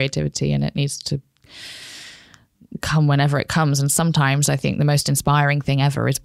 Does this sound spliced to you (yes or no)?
no